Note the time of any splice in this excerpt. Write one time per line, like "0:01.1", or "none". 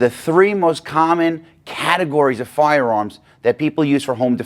none